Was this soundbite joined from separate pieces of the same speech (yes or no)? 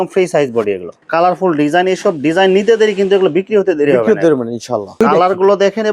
yes